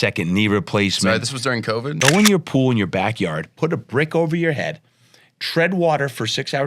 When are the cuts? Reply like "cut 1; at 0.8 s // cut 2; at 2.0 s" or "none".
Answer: cut 1; at 2.0 s